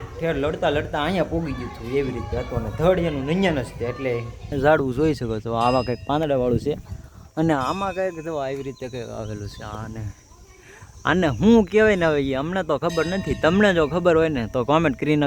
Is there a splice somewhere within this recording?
yes; 1 cut; at 4.4 s

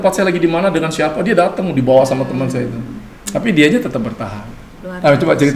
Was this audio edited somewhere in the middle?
no; 0 cuts

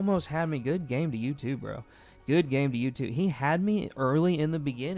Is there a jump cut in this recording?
no; 0 cuts

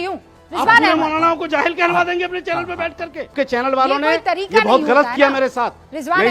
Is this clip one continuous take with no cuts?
no; 1 cut; at 3.3 s

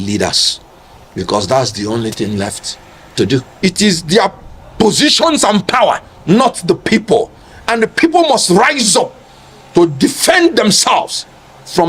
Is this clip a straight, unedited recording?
no; 1 cut; at 3.5 s

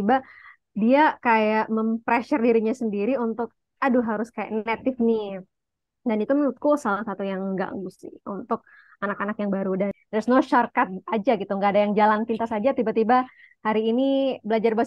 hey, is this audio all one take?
no; 1 cut; at 10.0 s

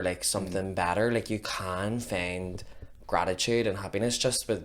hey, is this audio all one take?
yes; 0 cuts

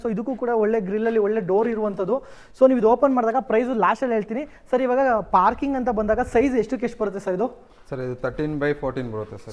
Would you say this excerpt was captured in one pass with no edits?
yes; 0 cuts

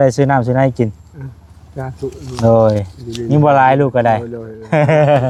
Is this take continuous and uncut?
yes; 0 cuts

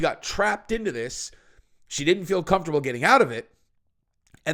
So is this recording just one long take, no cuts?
yes; 0 cuts

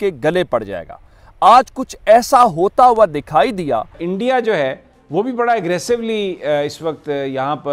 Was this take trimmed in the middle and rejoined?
yes; 1 cut; at 4.0 s

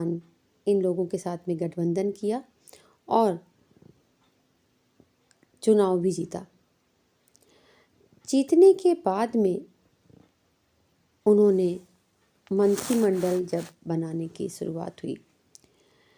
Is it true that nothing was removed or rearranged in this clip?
yes; 0 cuts

